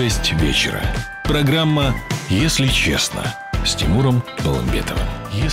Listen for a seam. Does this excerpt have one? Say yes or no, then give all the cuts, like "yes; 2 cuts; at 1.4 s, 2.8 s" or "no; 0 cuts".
no; 0 cuts